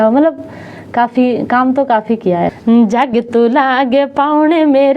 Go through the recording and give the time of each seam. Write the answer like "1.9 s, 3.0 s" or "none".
2.5 s